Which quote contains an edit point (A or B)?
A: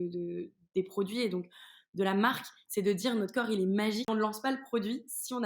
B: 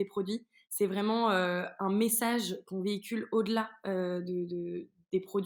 A